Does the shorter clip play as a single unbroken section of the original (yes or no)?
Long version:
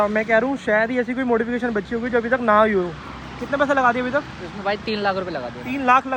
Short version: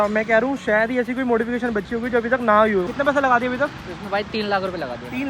no